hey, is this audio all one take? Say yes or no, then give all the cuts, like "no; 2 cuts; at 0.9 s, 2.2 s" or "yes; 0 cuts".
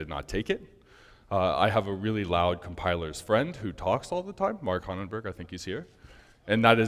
yes; 0 cuts